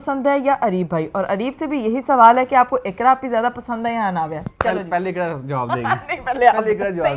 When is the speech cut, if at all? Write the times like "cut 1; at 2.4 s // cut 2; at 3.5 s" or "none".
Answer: none